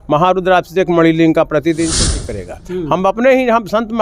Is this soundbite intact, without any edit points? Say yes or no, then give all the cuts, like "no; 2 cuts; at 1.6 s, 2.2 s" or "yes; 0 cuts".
no; 1 cut; at 2.1 s